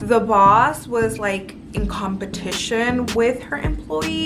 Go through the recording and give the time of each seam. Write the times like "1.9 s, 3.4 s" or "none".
none